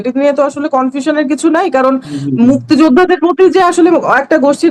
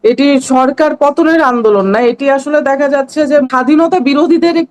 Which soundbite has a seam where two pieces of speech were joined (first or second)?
second